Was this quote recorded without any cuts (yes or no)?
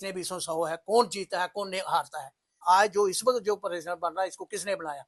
no